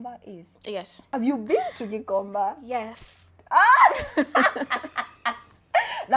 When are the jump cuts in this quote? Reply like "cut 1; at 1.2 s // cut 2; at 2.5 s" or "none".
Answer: none